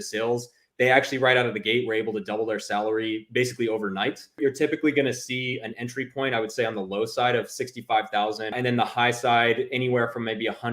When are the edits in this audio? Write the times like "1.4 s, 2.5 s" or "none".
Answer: 4.4 s, 8.6 s

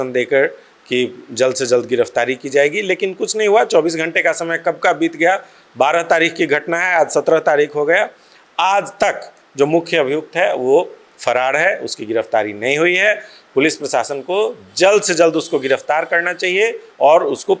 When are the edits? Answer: none

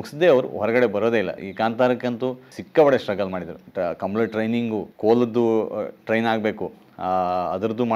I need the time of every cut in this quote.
1.4 s, 2.5 s, 3.6 s, 4.9 s

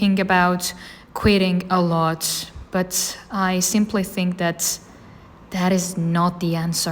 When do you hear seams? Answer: none

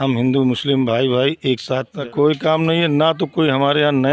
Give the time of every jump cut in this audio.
2.0 s

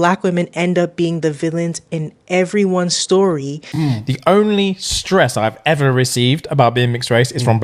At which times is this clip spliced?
3.5 s

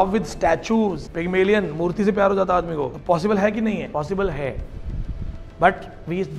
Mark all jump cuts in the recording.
1.1 s, 3.0 s, 3.9 s

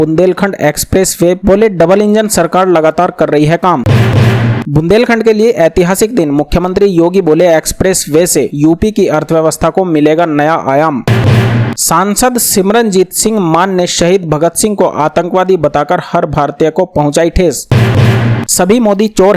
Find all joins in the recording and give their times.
3.9 s, 11.1 s, 17.7 s

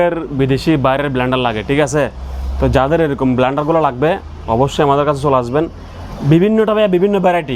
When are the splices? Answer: none

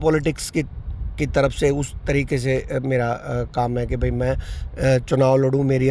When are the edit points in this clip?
none

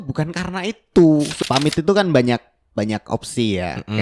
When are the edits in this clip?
1.3 s

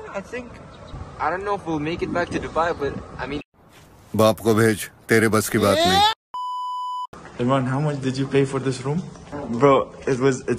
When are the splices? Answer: 1.0 s, 7.1 s, 9.3 s

